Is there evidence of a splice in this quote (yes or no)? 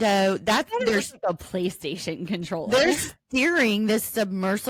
no